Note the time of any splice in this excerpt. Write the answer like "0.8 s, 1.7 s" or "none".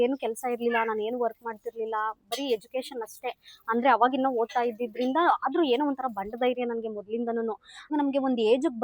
7.9 s